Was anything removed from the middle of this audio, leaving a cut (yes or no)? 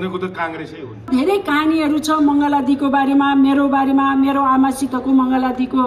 yes